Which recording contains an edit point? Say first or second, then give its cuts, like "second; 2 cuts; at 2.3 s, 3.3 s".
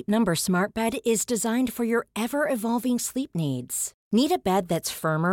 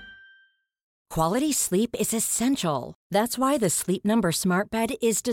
second; 1 cut; at 1.0 s